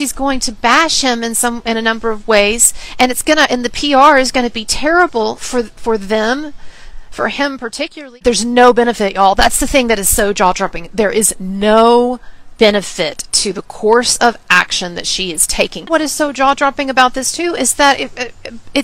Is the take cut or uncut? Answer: cut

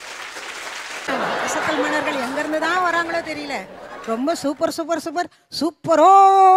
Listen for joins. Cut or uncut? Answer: cut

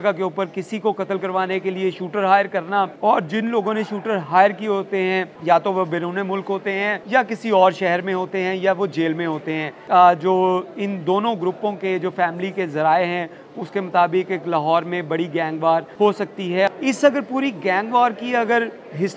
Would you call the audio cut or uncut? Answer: cut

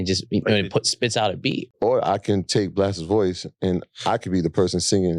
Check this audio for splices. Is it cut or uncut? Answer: cut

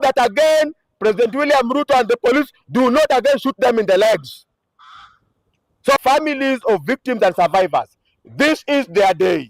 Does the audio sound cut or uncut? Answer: uncut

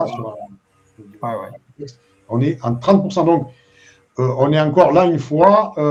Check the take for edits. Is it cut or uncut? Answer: uncut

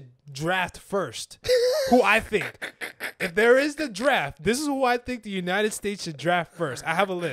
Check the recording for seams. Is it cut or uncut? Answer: uncut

